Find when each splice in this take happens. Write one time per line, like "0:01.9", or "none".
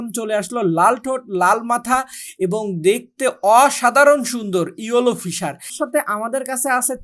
0:05.7

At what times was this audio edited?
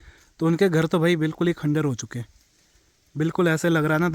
none

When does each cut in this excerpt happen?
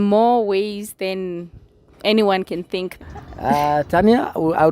0:02.9

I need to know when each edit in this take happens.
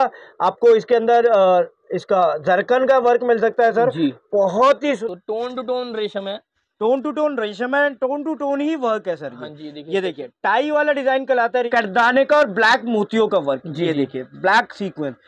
0:05.0
0:11.7

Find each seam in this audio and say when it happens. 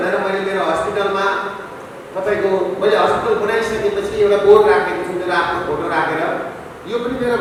none

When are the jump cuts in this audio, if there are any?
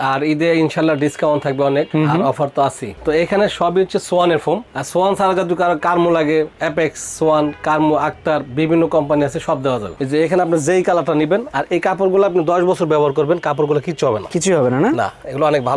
0:02.9
0:09.9

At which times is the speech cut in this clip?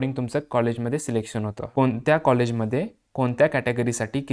0:01.6

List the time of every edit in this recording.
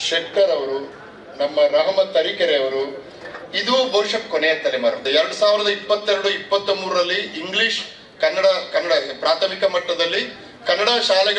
0:05.0

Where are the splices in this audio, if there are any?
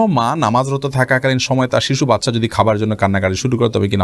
none

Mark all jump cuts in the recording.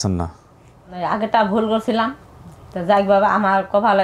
0:01.0

